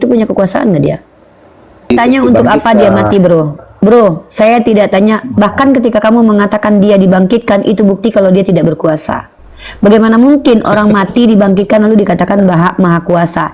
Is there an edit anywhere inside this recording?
yes; 1 cut; at 1.9 s

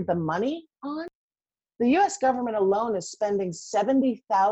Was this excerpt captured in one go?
no; 1 cut; at 1.1 s

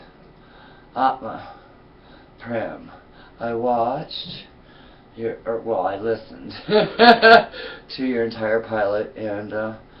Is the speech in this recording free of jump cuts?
no; 1 cut; at 6.9 s

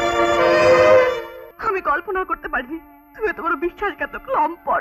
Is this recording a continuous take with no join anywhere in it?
no; 1 cut; at 1.4 s

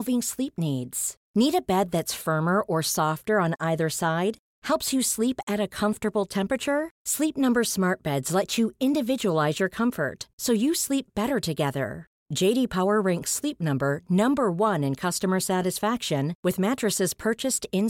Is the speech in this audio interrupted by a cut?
no; 0 cuts

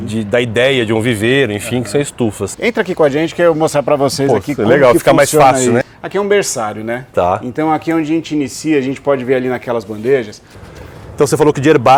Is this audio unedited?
no; 3 cuts; at 2.5 s, 5.9 s, 10.8 s

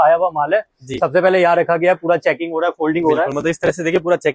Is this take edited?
no; 0 cuts

